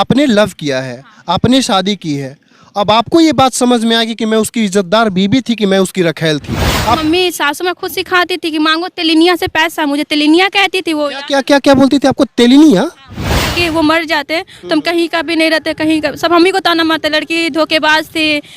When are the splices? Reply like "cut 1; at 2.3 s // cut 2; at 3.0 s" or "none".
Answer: cut 1; at 7.0 s // cut 2; at 13.4 s